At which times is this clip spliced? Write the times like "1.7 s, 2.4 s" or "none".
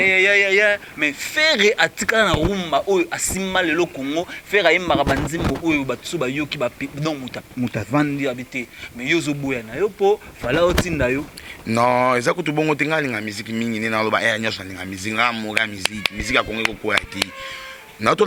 none

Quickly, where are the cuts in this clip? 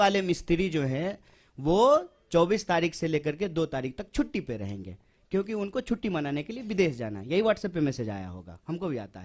none

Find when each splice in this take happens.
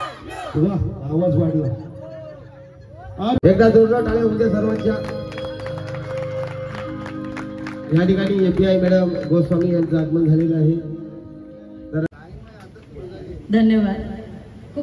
3.4 s, 12.1 s

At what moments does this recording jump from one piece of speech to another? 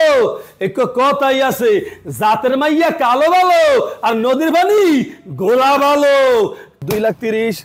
6.8 s

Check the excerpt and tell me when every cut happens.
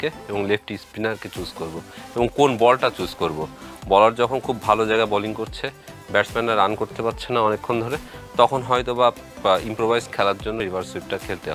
10.6 s

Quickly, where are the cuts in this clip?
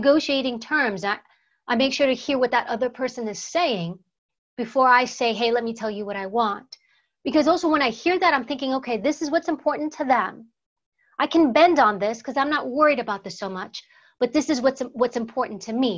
none

